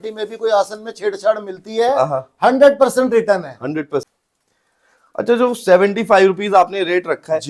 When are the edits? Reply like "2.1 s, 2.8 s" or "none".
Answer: 4.1 s